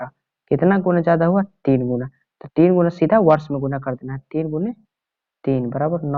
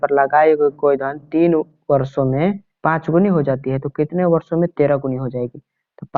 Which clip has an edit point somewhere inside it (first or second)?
second